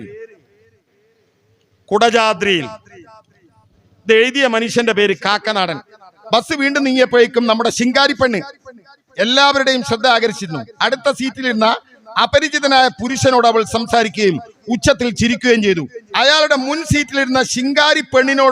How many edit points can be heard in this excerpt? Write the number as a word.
two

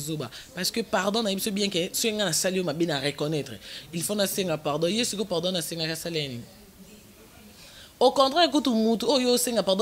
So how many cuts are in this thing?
zero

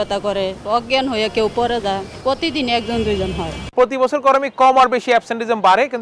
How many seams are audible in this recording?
one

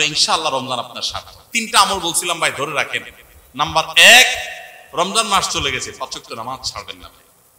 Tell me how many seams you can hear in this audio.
one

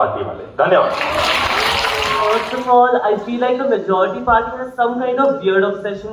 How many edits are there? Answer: one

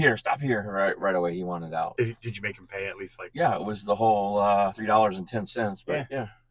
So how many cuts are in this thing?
three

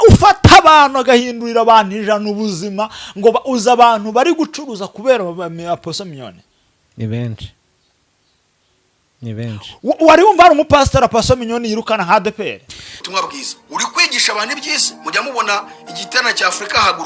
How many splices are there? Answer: one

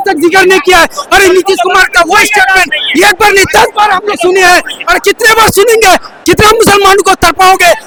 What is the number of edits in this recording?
zero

